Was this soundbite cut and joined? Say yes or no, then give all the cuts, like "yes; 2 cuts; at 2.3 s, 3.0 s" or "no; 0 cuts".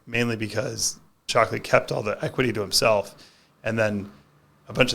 yes; 1 cut; at 1.2 s